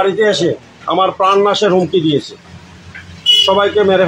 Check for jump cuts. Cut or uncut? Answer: uncut